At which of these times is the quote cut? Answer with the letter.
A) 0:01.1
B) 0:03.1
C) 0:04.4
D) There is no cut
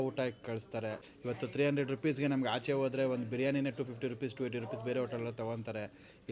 A